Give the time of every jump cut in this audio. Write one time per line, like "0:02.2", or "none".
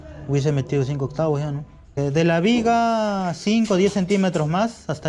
0:02.0